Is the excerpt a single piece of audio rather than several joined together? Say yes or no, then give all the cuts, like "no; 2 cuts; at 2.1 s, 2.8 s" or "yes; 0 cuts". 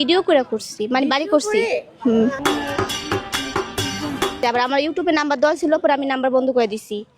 no; 1 cut; at 4.4 s